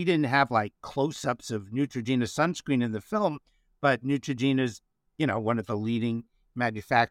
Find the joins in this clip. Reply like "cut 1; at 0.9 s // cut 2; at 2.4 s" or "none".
none